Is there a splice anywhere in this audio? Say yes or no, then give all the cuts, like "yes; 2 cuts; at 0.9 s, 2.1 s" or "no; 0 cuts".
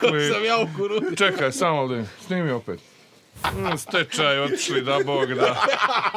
yes; 1 cut; at 3.4 s